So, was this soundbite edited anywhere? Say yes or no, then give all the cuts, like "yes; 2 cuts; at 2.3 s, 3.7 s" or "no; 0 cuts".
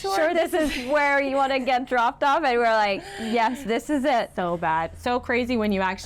no; 0 cuts